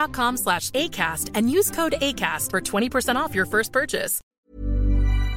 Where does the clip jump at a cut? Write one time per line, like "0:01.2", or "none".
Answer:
0:04.2

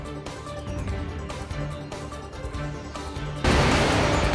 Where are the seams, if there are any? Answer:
0:02.3
0:03.4

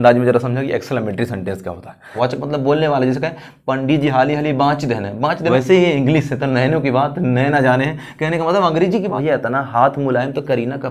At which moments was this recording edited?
0:02.2
0:05.5
0:09.1

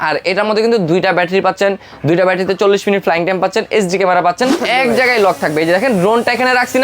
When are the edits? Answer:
0:04.6

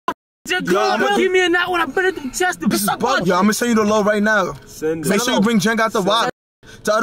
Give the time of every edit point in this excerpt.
0:01.2
0:03.2

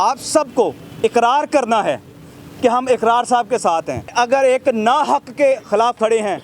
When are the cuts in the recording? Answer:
0:04.1

